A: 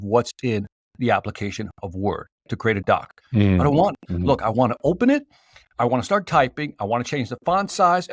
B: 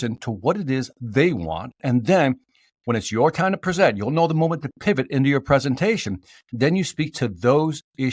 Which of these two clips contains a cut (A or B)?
A